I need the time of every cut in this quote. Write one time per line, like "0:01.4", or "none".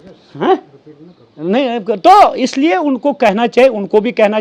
none